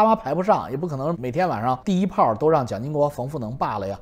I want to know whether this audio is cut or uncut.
cut